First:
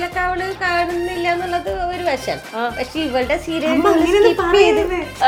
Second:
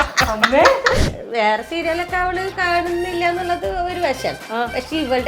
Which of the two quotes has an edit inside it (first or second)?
second